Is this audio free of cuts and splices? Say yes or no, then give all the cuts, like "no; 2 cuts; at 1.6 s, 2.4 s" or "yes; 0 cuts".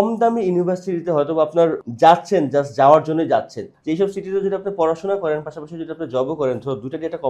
no; 2 cuts; at 1.8 s, 3.6 s